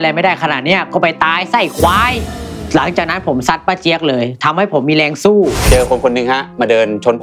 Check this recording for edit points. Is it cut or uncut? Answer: cut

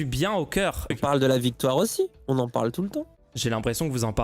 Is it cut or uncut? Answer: cut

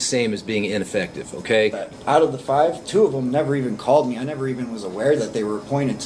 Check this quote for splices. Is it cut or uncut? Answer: cut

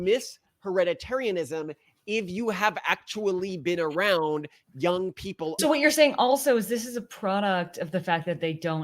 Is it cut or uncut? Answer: cut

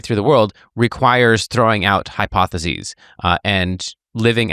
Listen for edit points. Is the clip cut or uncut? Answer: uncut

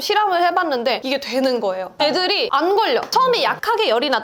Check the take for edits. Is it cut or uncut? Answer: cut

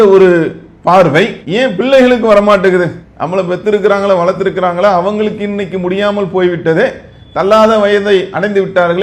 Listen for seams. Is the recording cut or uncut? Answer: uncut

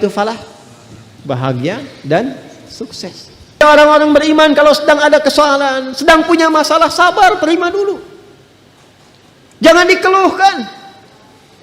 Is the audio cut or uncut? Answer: cut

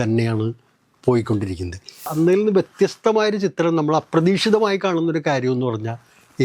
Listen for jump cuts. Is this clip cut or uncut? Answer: cut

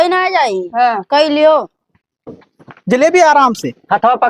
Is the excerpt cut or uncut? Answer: cut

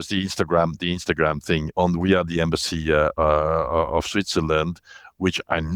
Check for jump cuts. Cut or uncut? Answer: cut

